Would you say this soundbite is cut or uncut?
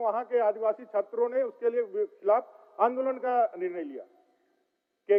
uncut